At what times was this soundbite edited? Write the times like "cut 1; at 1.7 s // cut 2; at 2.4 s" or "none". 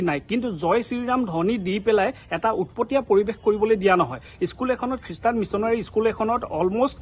none